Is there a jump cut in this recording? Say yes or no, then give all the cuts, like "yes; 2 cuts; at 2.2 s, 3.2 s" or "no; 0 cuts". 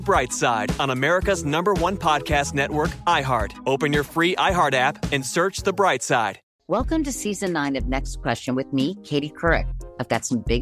yes; 1 cut; at 6.4 s